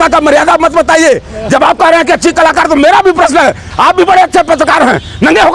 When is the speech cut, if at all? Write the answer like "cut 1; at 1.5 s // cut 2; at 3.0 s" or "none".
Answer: none